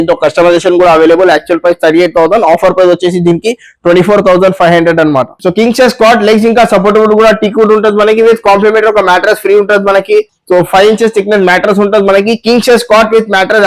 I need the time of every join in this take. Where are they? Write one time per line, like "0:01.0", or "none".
0:05.3